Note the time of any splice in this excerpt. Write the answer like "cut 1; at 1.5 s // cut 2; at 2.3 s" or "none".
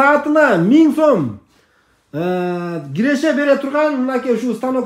none